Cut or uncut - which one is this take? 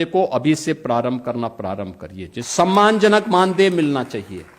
cut